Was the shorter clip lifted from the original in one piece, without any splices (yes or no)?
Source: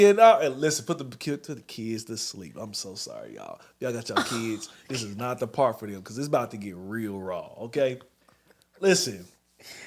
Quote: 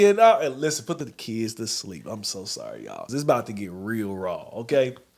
no